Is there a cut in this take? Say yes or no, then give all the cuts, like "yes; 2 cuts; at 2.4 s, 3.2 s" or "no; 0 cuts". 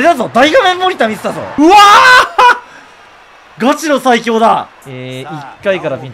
yes; 1 cut; at 1.4 s